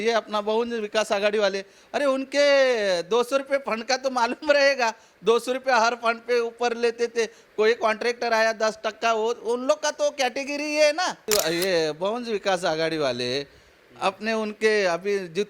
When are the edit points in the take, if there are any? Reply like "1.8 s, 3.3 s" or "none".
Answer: 11.2 s